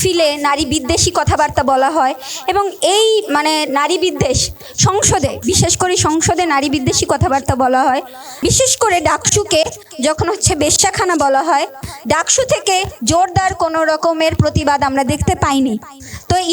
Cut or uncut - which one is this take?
cut